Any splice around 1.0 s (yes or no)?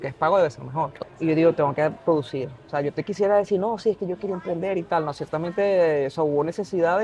yes